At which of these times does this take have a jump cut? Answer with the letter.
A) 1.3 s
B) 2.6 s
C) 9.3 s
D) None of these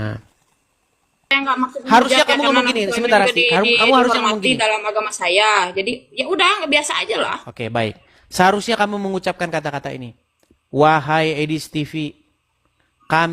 A